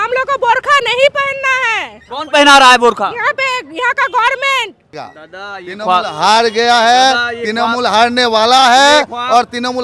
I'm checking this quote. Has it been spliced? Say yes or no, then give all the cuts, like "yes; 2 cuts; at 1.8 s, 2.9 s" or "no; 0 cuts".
yes; 1 cut; at 5.1 s